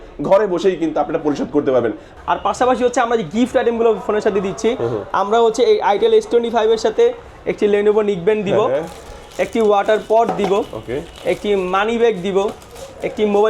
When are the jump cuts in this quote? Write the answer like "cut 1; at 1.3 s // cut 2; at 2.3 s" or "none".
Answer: cut 1; at 2.1 s